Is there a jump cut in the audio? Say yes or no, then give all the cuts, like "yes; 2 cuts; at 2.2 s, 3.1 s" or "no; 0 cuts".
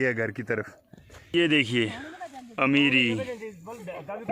yes; 1 cut; at 1.3 s